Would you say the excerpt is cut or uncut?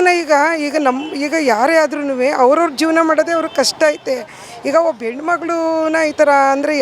uncut